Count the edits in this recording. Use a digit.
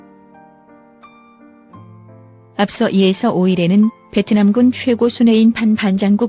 1